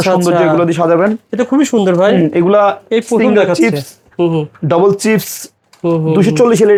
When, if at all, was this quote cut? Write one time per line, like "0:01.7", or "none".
none